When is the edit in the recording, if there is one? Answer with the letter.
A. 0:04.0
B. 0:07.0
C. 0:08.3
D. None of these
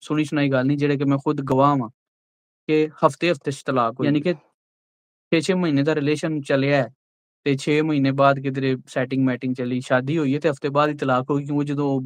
A